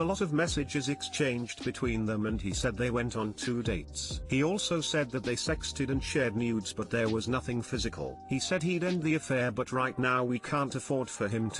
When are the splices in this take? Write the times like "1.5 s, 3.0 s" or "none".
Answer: none